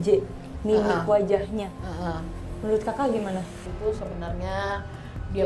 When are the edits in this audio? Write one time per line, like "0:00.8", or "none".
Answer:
0:03.7